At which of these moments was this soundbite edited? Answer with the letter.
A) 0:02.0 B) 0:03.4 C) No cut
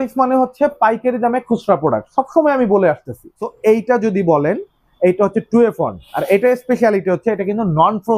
B